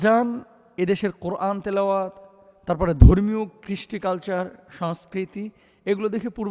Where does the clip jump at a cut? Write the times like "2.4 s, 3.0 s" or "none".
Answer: none

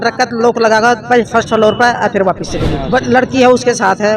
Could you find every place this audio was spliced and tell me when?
2.8 s

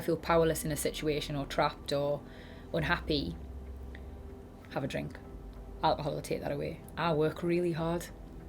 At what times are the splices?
6.8 s

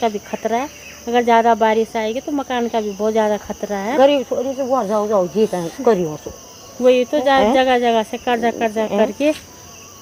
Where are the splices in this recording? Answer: none

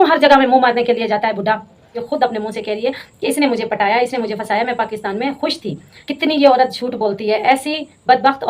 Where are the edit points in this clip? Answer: 2.0 s, 5.9 s

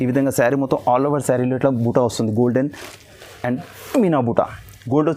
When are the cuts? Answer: none

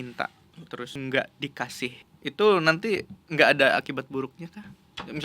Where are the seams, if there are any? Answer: 0.9 s, 2.1 s

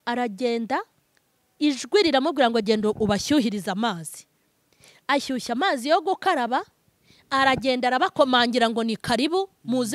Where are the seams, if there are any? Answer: none

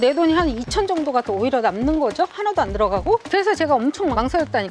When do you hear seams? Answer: 3.2 s

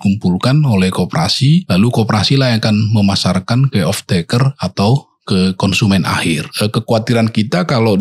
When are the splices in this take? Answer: 1.7 s, 6.5 s

